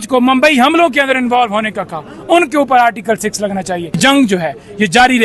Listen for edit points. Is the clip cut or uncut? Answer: cut